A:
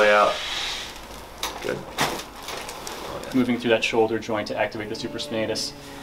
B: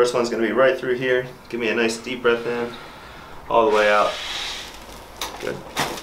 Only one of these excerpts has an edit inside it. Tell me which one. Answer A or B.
A